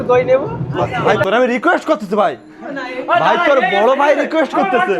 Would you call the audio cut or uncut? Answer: cut